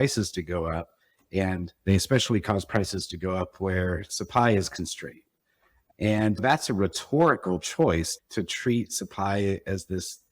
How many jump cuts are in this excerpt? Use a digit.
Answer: 2